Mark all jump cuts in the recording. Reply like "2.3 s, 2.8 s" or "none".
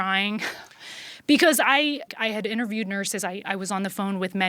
2.1 s